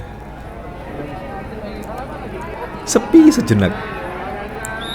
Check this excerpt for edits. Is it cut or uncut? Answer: cut